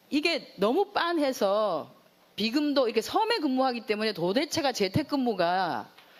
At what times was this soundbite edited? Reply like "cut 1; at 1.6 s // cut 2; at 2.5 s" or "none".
none